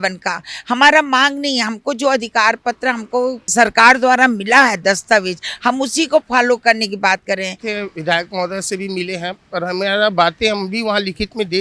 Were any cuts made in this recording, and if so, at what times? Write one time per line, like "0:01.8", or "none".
0:03.5
0:07.6